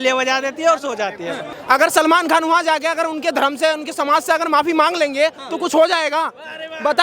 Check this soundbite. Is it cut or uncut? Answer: cut